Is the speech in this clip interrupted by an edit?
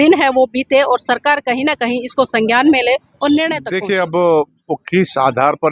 yes; 1 cut; at 3.7 s

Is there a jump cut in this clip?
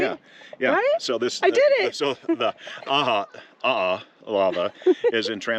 no; 0 cuts

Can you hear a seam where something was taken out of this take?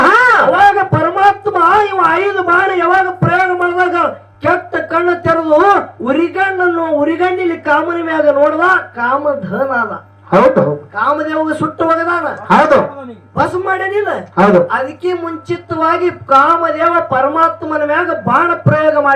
no; 0 cuts

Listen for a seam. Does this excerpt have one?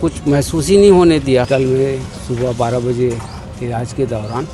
yes; 1 cut; at 1.5 s

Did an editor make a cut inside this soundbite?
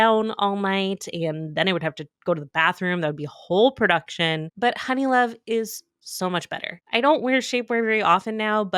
no; 0 cuts

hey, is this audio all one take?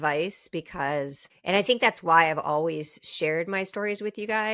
no; 1 cut; at 1.3 s

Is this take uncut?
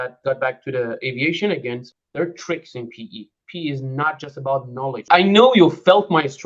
no; 2 cuts; at 1.9 s, 5.1 s

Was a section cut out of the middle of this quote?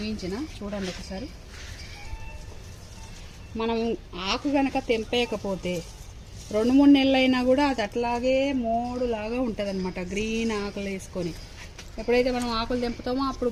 no; 0 cuts

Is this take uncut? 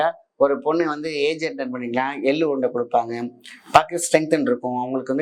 yes; 0 cuts

